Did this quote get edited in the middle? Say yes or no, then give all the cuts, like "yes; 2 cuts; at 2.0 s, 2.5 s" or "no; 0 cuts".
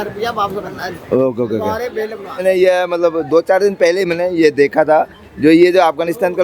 yes; 1 cut; at 2.4 s